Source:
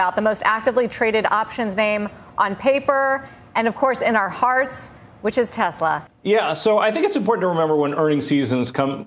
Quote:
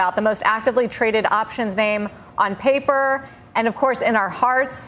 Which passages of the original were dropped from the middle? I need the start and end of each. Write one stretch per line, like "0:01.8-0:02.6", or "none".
none